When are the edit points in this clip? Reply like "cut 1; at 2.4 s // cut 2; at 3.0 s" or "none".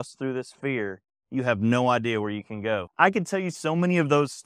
cut 1; at 2.9 s